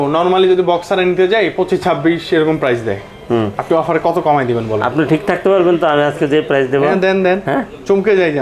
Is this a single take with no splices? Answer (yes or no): yes